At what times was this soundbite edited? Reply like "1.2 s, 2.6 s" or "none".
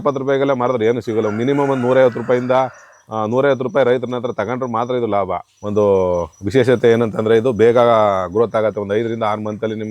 5.5 s